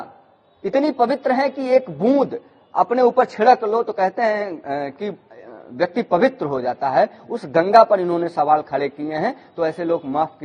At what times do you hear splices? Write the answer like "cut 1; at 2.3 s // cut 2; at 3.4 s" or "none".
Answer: none

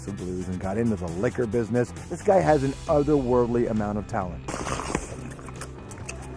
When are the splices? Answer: cut 1; at 1.5 s

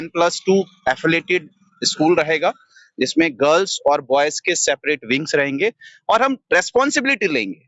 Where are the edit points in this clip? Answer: none

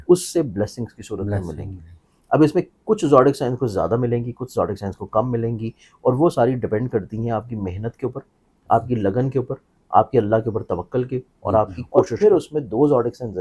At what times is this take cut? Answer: cut 1; at 12.1 s

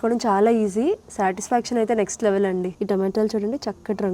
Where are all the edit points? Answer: cut 1; at 2.7 s

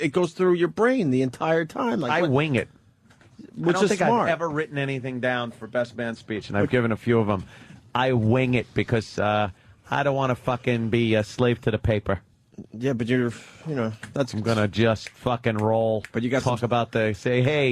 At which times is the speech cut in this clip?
cut 1; at 1.9 s

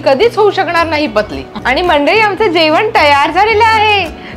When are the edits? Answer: cut 1; at 1.5 s

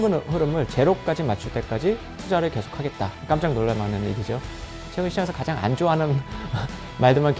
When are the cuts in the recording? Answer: cut 1; at 4.8 s

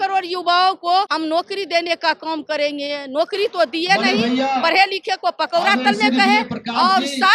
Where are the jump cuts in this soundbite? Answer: cut 1; at 1.1 s

